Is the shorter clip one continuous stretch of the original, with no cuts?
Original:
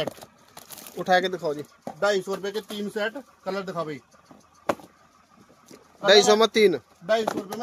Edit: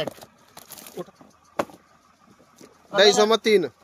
no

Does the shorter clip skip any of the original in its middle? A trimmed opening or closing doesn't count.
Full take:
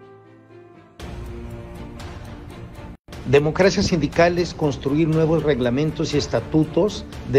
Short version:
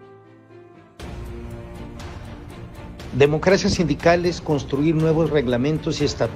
yes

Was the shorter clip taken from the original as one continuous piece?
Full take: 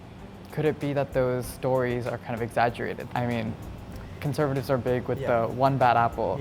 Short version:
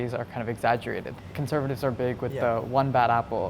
no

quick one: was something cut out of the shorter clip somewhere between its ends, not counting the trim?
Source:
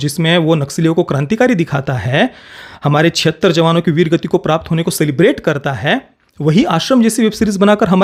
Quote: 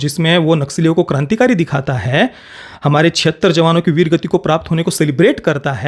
no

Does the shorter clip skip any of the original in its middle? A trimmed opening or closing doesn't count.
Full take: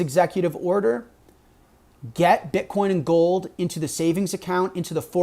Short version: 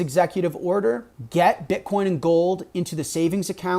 yes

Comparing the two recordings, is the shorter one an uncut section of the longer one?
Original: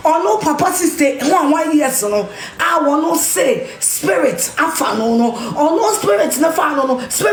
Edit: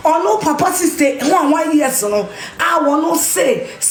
yes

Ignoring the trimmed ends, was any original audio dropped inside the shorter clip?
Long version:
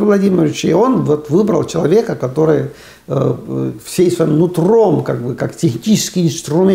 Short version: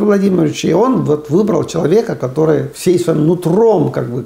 yes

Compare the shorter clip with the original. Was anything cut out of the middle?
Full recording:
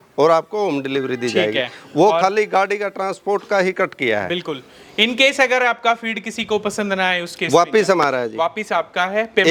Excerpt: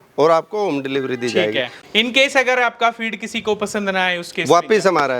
yes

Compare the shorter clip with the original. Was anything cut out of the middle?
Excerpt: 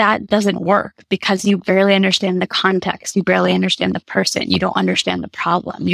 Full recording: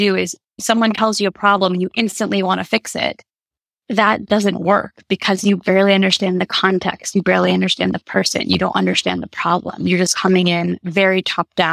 no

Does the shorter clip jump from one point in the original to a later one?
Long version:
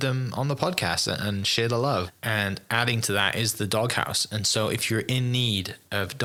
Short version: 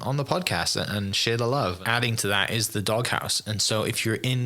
yes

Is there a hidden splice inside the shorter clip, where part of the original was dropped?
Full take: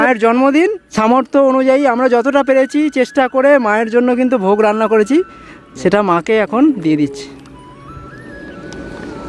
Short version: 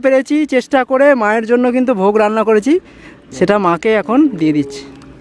no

